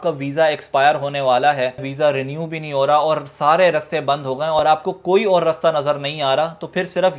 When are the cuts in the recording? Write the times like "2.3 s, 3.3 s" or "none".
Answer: none